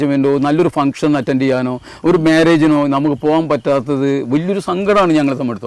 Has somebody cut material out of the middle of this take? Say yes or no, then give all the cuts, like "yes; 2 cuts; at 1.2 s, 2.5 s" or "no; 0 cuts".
no; 0 cuts